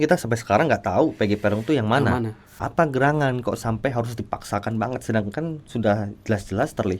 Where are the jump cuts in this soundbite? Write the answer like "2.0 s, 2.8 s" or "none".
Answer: 2.7 s